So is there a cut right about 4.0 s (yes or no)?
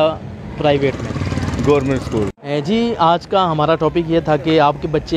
no